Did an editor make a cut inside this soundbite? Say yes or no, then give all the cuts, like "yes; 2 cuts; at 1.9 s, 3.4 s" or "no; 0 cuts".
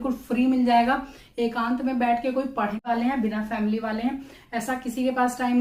yes; 1 cut; at 2.8 s